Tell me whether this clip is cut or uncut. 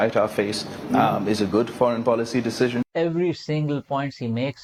uncut